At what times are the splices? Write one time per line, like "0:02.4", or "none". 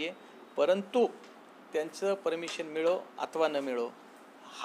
none